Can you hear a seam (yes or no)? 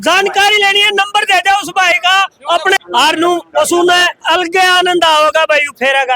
yes